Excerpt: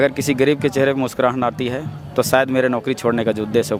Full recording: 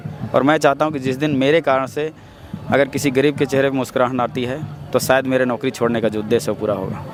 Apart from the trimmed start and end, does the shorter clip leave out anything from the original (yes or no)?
no